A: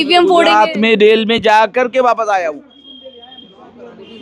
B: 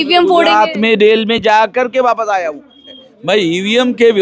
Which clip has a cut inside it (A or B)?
B